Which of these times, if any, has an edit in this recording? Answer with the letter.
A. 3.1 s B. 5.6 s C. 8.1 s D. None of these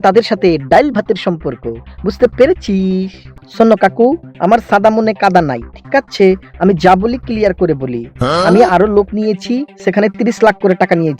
A